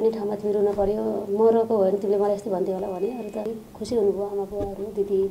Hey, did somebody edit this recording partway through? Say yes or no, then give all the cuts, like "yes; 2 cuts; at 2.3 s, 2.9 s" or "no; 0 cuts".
yes; 1 cut; at 3.5 s